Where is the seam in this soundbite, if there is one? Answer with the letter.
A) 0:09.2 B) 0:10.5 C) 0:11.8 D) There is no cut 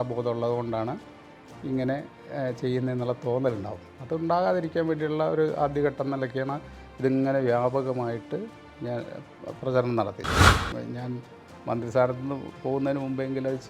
B